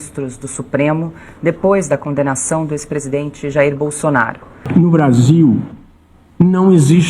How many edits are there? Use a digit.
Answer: 1